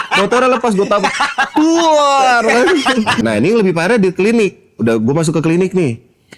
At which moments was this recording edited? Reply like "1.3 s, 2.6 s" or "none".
3.2 s